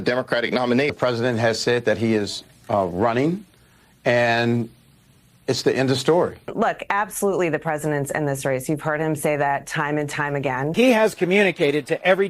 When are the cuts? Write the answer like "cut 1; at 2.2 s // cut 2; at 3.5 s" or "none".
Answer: cut 1; at 0.9 s // cut 2; at 6.5 s // cut 3; at 10.7 s